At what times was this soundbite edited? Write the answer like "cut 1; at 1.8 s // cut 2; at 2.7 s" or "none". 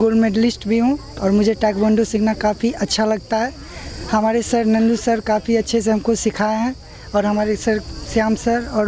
none